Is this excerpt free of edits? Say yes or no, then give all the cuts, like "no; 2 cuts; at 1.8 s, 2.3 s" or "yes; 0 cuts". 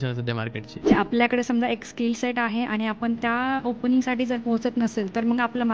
no; 1 cut; at 0.9 s